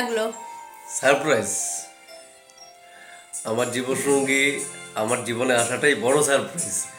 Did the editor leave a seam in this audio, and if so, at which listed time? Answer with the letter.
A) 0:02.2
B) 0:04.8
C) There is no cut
C